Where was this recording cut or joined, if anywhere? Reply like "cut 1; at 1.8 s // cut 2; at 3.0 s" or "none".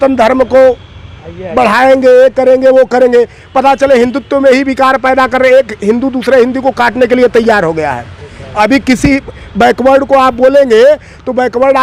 none